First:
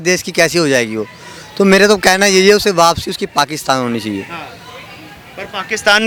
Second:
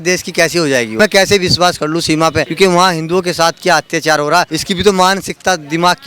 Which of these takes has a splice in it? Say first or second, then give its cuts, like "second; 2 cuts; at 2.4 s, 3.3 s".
second; 3 cuts; at 1.0 s, 2.5 s, 4.5 s